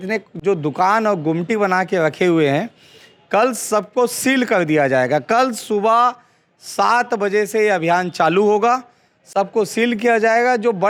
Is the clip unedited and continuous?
yes; 0 cuts

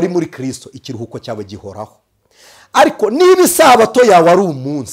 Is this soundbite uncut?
yes; 0 cuts

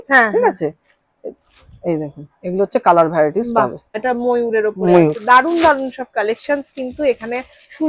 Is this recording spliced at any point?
yes; 1 cut; at 4.0 s

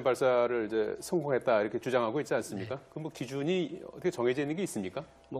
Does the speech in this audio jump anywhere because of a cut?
yes; 1 cut; at 4.0 s

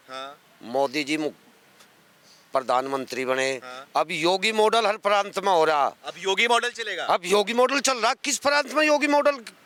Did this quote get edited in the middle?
no; 0 cuts

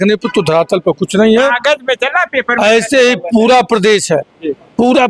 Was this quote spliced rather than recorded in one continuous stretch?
no; 0 cuts

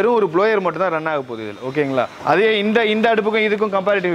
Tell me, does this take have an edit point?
no; 0 cuts

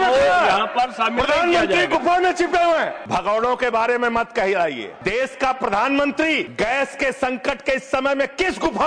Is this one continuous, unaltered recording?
no; 3 cuts; at 3.0 s, 4.9 s, 6.5 s

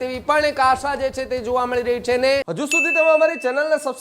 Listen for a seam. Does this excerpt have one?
yes; 1 cut; at 2.5 s

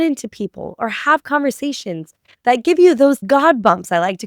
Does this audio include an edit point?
yes; 1 cut; at 3.2 s

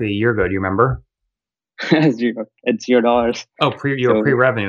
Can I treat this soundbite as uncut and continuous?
yes; 0 cuts

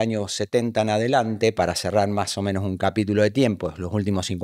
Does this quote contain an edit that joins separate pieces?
no; 0 cuts

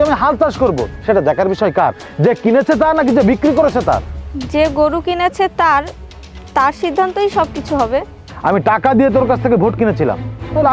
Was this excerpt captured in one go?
no; 1 cut; at 8.2 s

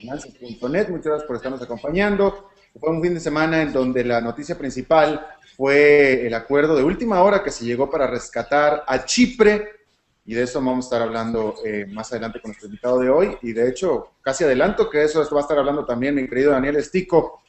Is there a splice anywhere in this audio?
no; 0 cuts

